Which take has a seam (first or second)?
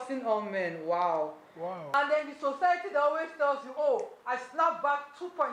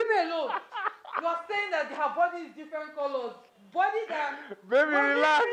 first